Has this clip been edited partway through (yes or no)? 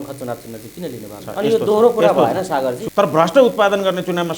yes